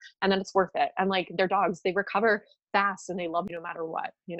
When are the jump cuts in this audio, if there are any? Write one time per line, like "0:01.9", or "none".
0:03.5